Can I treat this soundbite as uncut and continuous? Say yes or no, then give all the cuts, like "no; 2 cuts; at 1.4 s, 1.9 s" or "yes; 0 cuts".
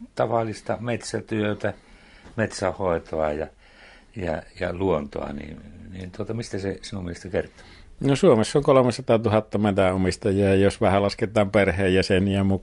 yes; 0 cuts